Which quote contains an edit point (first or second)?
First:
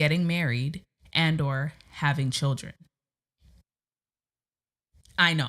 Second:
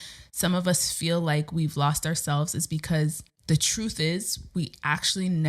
second